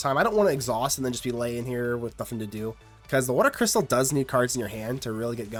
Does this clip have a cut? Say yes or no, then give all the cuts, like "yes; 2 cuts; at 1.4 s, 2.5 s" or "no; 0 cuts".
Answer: no; 0 cuts